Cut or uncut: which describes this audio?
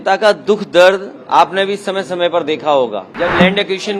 cut